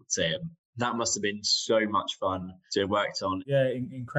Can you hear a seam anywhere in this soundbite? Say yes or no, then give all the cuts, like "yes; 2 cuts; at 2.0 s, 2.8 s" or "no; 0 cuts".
yes; 2 cuts; at 2.5 s, 3.4 s